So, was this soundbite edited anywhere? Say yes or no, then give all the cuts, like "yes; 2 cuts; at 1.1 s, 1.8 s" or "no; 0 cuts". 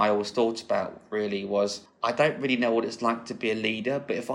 yes; 1 cut; at 1.9 s